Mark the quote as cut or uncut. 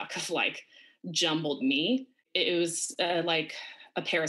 cut